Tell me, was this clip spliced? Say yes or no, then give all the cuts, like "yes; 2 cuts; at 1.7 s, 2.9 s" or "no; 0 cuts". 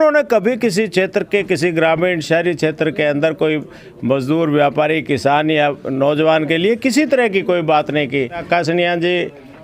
yes; 1 cut; at 8.4 s